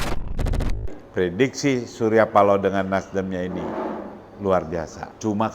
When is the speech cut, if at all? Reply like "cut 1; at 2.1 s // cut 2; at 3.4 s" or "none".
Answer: cut 1; at 1.0 s